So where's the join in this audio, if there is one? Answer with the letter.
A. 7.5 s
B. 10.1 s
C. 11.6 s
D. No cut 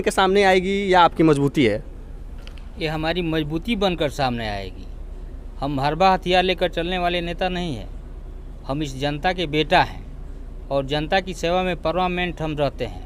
D